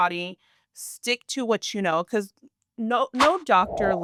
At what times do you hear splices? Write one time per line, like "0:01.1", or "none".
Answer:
none